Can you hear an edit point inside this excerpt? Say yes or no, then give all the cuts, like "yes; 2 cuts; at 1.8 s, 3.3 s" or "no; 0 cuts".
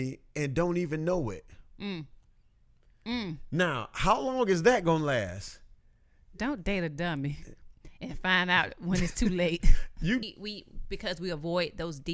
yes; 1 cut; at 10.3 s